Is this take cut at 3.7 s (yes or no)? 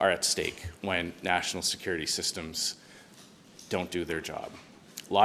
no